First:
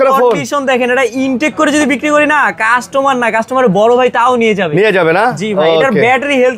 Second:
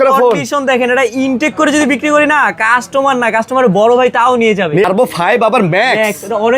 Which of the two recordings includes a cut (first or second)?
second